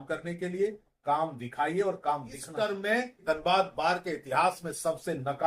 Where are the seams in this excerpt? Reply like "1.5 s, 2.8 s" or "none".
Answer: 2.4 s, 3.2 s